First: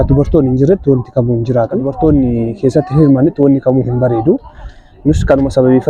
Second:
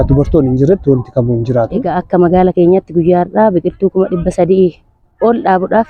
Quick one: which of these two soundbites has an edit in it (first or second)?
second